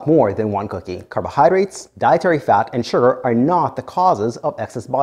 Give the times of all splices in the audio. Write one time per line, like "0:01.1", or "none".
0:01.1
0:01.8